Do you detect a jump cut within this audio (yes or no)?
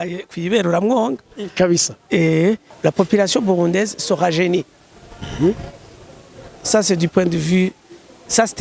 yes